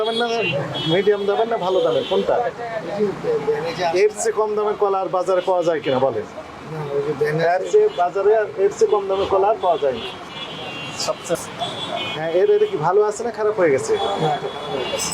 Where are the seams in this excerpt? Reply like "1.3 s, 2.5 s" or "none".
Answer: none